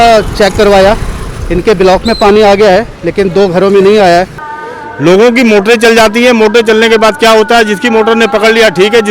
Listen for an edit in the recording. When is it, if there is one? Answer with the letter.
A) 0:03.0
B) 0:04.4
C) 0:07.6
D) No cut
B